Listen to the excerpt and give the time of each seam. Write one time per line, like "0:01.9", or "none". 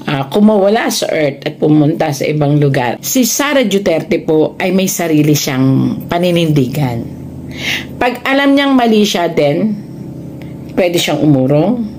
0:03.0